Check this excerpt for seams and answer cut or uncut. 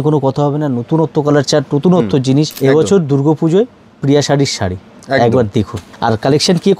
cut